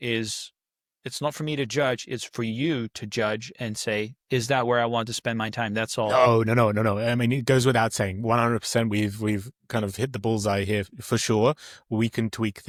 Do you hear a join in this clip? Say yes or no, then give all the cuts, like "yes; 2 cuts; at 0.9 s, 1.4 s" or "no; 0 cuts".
no; 0 cuts